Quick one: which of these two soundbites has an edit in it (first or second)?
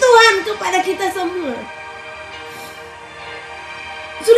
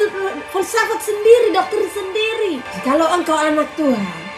second